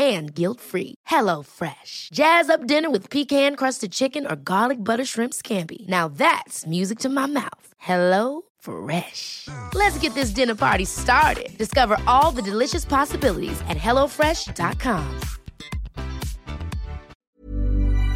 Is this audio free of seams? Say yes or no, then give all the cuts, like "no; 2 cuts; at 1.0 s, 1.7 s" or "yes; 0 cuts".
no; 1 cut; at 17.2 s